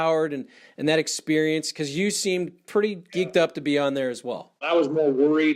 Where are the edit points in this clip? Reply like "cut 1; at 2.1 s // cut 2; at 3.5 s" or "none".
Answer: cut 1; at 4.6 s